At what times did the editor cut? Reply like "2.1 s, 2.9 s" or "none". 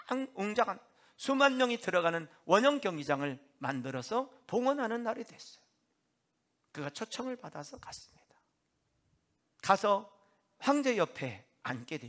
9.4 s